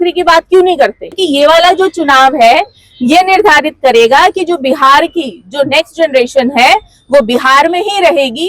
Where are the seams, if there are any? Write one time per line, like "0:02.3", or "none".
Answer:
0:01.2